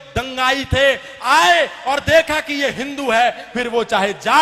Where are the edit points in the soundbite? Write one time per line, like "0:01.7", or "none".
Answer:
none